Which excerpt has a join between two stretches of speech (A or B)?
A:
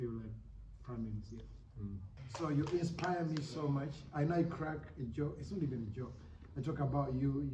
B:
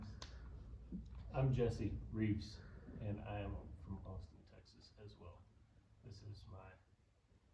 A